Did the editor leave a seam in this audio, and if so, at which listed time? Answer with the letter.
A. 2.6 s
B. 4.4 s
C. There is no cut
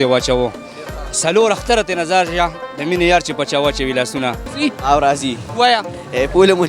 B